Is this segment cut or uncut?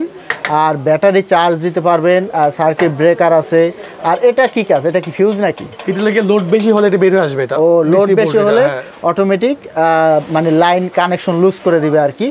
uncut